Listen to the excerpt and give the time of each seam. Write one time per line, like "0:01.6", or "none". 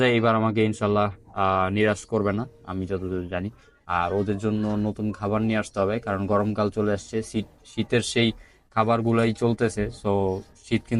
none